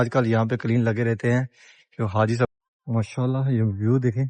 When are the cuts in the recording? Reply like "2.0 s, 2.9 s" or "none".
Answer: 2.5 s